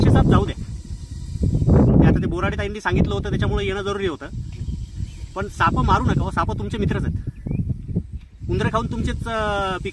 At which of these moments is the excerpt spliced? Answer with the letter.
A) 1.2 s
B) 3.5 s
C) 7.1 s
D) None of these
D